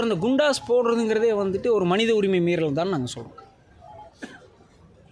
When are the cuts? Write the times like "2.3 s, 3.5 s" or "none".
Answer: none